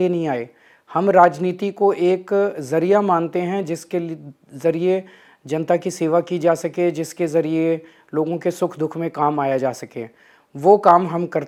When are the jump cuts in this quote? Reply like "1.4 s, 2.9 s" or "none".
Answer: none